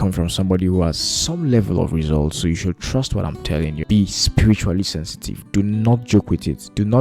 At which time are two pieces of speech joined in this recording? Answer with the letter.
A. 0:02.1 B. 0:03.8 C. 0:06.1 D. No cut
B